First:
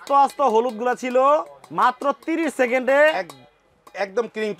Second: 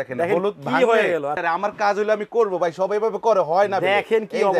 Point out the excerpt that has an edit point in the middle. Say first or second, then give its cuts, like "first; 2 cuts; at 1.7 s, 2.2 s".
second; 1 cut; at 1.4 s